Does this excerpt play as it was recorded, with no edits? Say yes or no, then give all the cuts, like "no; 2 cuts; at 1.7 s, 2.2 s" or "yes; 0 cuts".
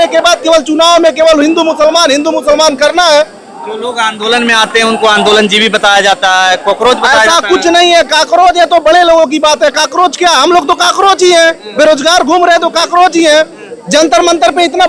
yes; 0 cuts